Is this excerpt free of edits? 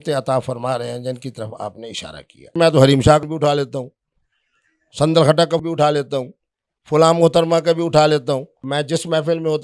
no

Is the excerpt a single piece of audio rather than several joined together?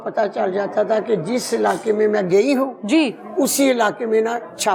yes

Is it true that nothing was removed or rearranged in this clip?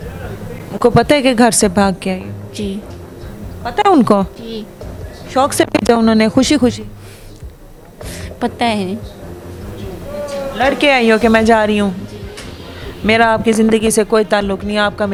yes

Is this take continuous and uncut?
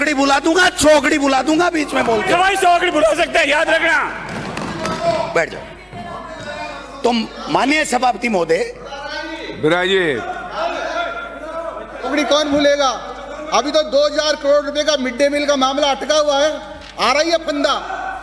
yes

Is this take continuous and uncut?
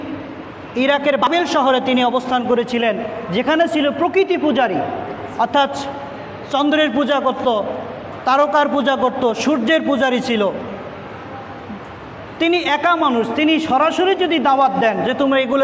no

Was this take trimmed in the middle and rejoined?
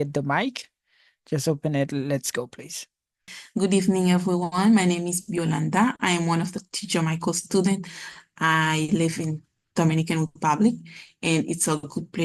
yes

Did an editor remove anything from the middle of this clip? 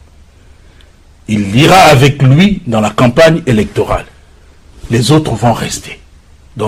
no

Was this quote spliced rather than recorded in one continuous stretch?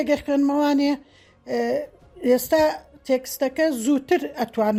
no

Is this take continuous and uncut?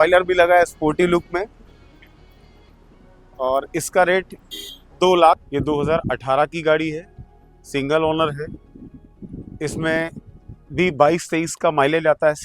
no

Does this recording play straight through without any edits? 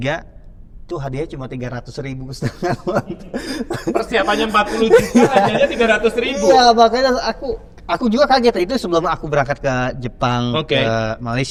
yes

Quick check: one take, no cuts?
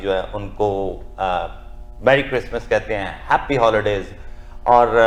yes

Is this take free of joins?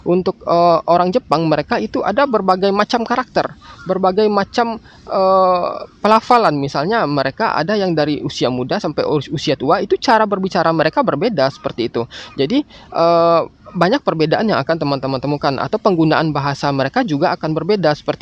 yes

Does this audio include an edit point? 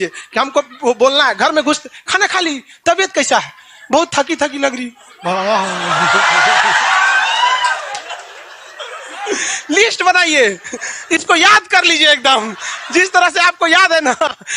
no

